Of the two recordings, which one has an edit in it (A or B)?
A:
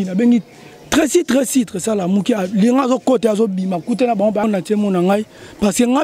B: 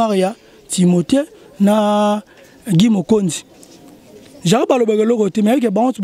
A